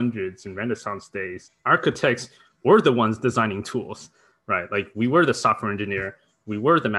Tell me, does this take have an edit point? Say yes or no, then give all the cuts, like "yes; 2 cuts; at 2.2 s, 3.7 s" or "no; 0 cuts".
yes; 1 cut; at 1.5 s